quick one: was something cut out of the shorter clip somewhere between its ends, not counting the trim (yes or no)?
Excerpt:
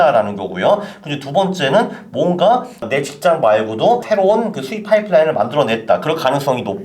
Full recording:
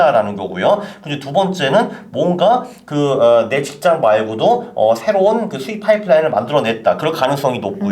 yes